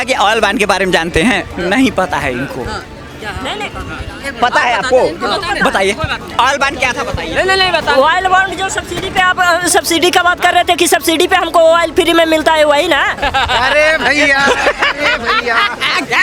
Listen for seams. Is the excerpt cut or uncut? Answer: uncut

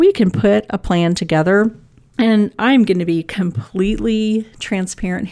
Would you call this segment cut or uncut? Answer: uncut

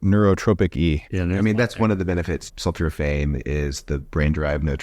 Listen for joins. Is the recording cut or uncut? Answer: cut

